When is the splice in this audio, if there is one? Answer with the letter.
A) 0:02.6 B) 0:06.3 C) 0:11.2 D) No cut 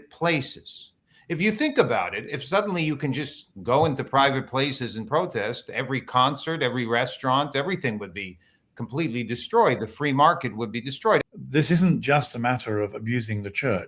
C